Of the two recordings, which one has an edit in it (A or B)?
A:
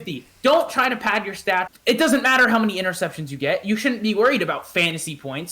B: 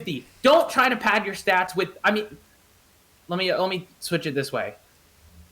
A